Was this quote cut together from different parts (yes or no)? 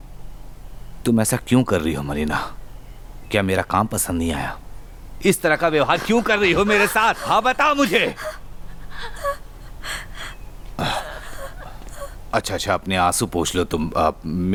no